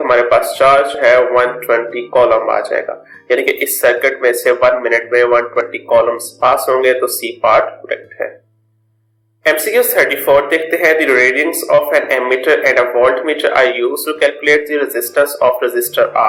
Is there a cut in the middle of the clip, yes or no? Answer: no